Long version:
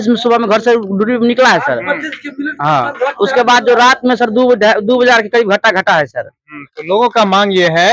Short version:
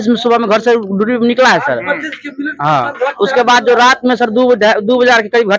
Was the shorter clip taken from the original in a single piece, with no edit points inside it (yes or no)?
yes